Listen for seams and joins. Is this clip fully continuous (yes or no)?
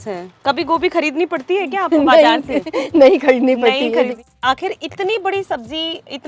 no